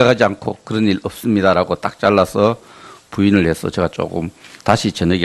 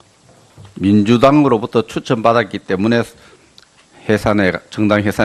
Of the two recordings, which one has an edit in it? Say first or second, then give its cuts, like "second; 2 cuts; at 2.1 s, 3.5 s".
first; 1 cut; at 2.0 s